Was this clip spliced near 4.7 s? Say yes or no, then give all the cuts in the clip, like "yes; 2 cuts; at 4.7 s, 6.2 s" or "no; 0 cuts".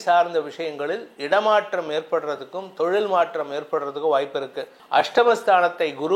yes; 1 cut; at 4.7 s